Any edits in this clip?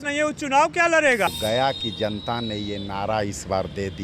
yes; 1 cut; at 1.3 s

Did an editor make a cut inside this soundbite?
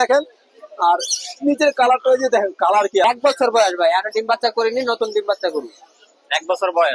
yes; 1 cut; at 3.0 s

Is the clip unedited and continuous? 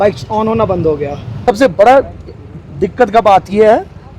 no; 1 cut; at 1.3 s

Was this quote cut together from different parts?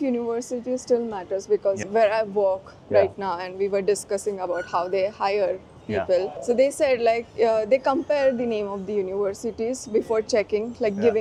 no; 0 cuts

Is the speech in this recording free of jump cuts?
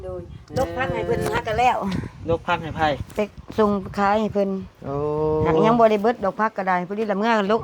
yes; 0 cuts

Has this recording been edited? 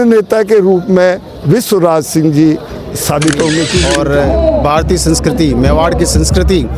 yes; 1 cut; at 3.8 s

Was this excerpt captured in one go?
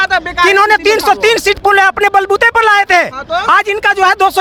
yes; 0 cuts

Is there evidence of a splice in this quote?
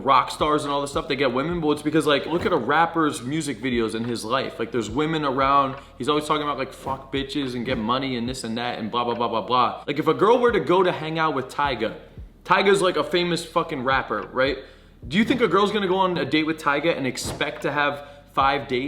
yes; 2 cuts; at 2.3 s, 16.2 s

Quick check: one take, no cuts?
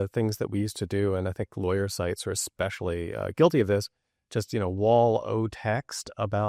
yes; 0 cuts

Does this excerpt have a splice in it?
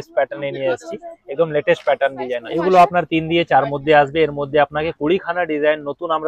yes; 1 cut; at 2.5 s

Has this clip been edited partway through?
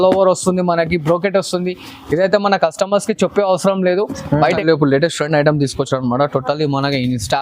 yes; 1 cut; at 4.6 s

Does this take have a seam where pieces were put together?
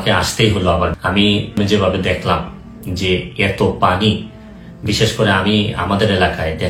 yes; 1 cut; at 1.3 s

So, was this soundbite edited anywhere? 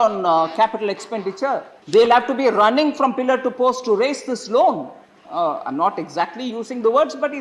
yes; 1 cut; at 1.8 s

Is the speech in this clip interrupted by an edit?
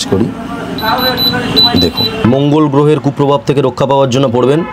yes; 1 cut; at 2.2 s

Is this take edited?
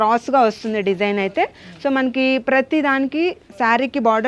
no; 0 cuts

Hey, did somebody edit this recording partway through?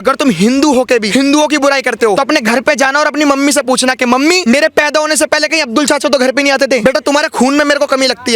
yes; 4 cuts; at 1.1 s, 2.2 s, 4.4 s, 6.8 s

